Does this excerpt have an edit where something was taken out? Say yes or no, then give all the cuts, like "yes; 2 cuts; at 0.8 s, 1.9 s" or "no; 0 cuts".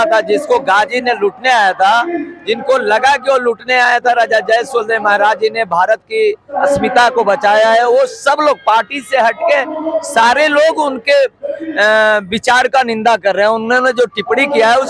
no; 0 cuts